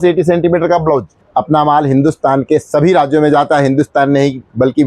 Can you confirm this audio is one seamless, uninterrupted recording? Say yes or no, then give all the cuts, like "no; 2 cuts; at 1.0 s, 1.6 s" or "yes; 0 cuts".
no; 1 cut; at 1.2 s